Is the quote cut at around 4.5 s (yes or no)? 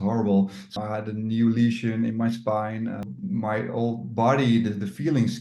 no